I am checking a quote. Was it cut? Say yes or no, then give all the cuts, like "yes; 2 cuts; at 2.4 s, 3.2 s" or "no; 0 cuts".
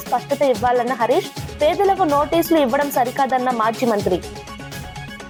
no; 0 cuts